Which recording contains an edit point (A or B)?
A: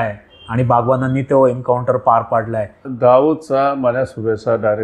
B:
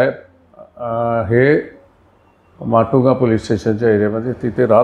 A